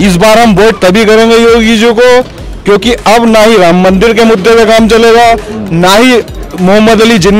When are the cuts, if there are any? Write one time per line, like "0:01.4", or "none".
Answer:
none